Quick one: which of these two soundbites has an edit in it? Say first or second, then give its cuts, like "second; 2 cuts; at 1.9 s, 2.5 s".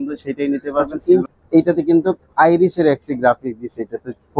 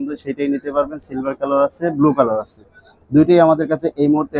first; 1 cut; at 0.9 s